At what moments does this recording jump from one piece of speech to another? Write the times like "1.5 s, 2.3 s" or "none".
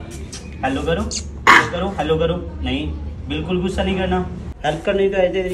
4.4 s